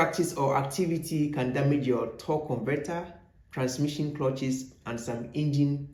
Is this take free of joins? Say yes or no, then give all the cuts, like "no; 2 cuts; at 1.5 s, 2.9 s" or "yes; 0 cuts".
yes; 0 cuts